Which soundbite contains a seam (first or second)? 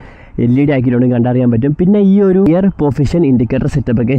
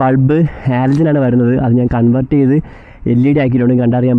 first